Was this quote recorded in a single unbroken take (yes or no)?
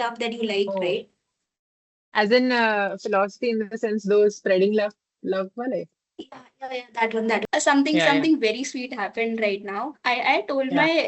no